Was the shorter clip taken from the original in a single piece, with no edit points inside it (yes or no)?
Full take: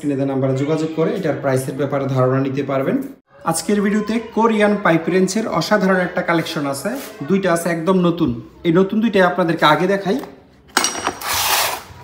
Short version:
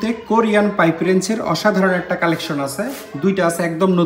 yes